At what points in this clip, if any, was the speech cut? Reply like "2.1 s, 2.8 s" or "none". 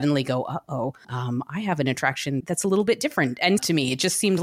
1.1 s, 2.4 s, 3.6 s